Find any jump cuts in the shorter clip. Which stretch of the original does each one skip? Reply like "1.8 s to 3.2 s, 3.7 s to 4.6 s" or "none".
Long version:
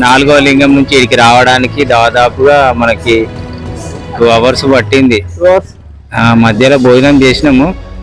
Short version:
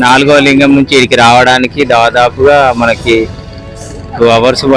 none